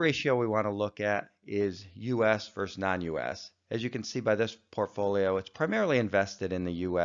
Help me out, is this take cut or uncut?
cut